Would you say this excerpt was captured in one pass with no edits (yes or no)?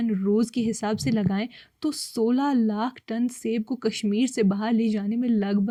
yes